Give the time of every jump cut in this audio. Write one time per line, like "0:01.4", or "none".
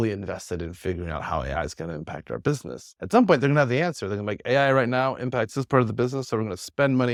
none